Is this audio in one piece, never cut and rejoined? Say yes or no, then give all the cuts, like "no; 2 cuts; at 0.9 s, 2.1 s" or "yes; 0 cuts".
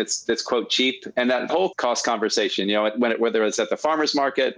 no; 1 cut; at 1.5 s